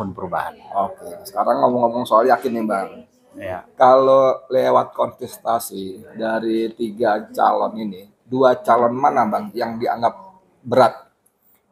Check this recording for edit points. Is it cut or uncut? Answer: uncut